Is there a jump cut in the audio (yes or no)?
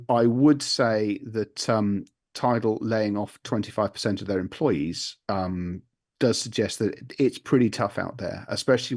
no